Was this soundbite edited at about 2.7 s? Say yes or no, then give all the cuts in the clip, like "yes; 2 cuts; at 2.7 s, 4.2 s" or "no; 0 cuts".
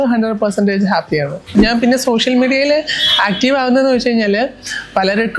no; 1 cut; at 1.5 s